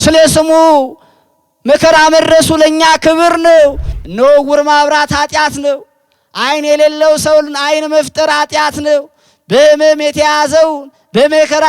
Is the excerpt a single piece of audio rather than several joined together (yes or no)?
no